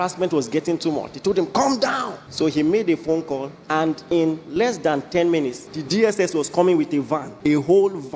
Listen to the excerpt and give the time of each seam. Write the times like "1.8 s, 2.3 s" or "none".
2.2 s, 3.5 s, 5.7 s, 7.3 s

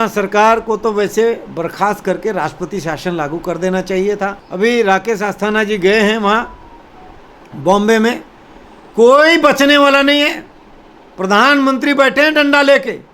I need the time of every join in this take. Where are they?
4.4 s

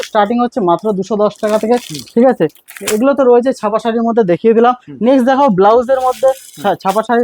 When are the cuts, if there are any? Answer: none

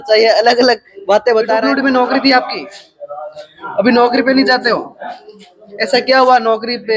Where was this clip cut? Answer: 1.6 s

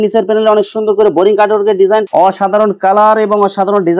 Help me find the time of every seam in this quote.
2.1 s

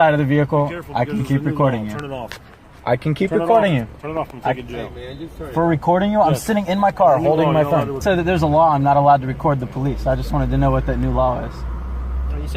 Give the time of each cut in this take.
8.0 s

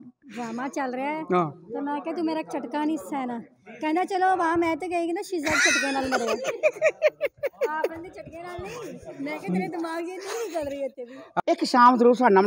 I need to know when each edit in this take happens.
11.3 s

